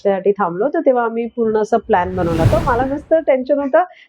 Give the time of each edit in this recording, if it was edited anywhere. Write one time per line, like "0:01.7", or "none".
0:02.5

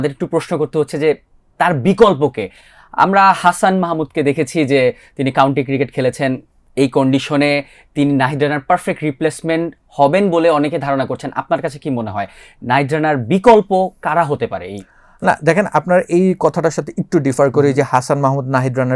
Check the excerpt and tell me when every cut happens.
none

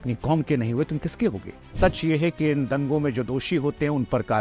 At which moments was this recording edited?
0:01.7

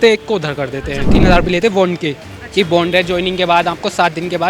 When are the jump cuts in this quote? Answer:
0:01.1

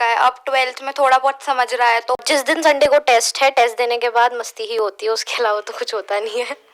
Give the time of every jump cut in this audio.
0:02.2

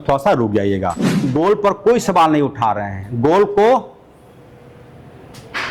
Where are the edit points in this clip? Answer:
0:01.1

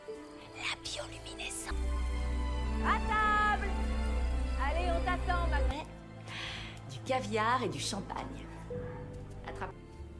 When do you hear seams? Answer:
0:05.6

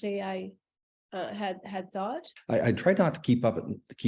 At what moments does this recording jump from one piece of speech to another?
0:02.3

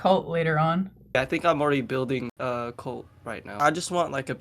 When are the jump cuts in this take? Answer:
0:01.2
0:03.6

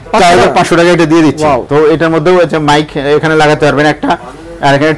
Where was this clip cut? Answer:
none

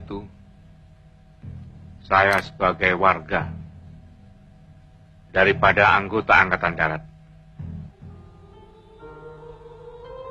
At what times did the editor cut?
0:07.9

